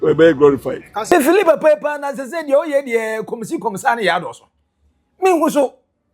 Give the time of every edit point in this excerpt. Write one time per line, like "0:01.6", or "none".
0:01.0